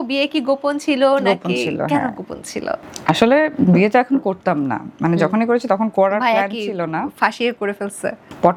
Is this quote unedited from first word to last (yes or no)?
yes